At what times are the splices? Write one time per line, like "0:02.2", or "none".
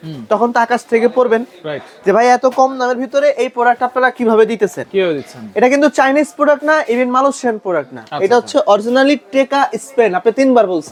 none